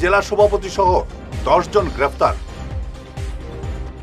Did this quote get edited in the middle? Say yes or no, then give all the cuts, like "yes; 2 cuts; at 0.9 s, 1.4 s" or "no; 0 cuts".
yes; 1 cut; at 2.4 s